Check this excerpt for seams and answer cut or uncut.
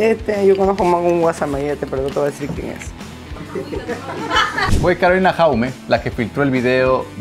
cut